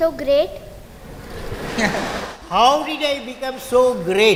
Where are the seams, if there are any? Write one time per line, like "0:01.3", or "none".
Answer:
none